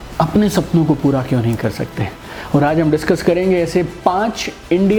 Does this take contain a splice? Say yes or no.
no